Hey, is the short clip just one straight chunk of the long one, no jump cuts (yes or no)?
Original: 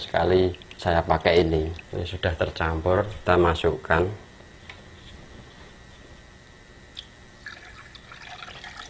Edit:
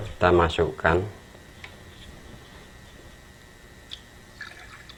yes